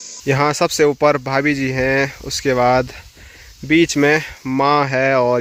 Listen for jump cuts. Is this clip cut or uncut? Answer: uncut